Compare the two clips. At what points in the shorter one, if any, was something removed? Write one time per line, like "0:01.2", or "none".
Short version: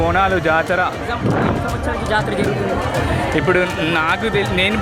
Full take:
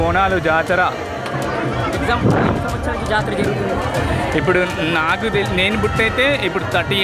0:01.0